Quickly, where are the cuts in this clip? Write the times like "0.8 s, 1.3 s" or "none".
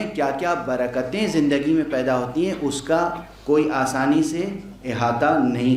none